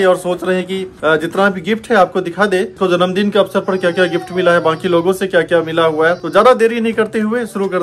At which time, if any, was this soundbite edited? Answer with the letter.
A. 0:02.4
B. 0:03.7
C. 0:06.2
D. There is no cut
D